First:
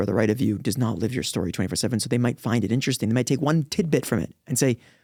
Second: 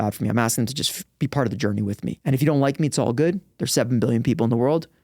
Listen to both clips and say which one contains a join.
second; 1 cut; at 2.2 s

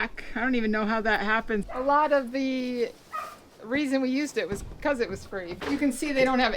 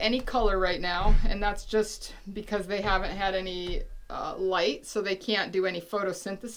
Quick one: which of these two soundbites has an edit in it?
first; 2 cuts; at 1.6 s, 5.5 s

